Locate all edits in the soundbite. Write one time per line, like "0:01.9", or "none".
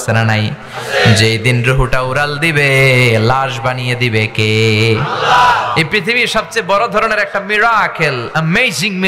none